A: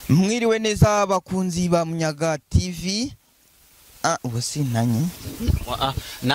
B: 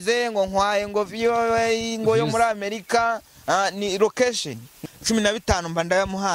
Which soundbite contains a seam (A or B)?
B